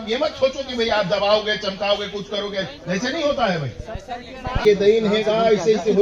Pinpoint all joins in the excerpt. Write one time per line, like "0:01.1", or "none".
0:04.6